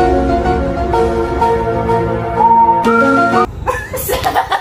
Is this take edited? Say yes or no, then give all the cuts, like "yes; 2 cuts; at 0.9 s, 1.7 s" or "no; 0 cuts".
yes; 1 cut; at 3.5 s